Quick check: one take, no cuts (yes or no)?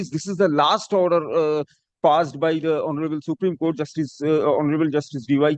yes